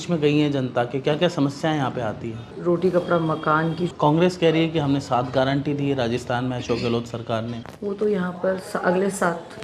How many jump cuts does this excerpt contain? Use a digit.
3